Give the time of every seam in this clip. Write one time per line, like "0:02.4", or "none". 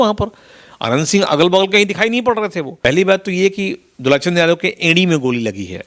0:02.7